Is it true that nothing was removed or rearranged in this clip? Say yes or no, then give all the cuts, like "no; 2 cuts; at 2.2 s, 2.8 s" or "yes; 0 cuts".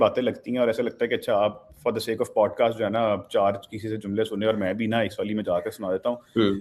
yes; 0 cuts